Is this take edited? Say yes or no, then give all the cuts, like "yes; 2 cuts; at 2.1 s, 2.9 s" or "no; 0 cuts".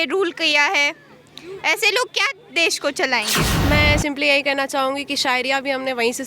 yes; 1 cut; at 3.4 s